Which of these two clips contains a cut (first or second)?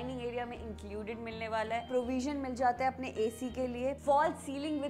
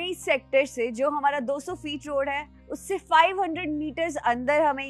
first